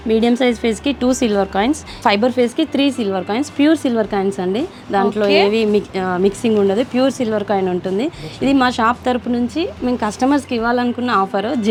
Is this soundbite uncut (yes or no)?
yes